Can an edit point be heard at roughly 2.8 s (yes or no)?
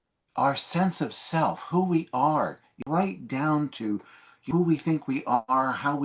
yes